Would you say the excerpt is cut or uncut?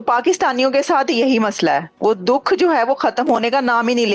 uncut